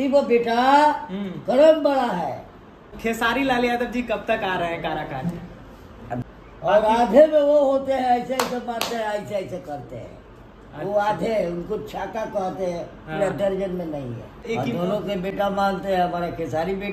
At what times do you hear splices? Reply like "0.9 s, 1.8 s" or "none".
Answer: 2.9 s, 6.2 s, 14.4 s